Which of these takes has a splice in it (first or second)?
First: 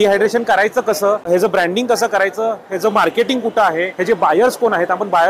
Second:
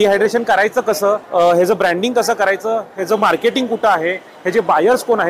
first